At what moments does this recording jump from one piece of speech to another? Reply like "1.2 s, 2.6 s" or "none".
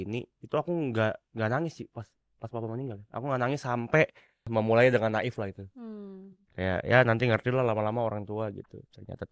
4.5 s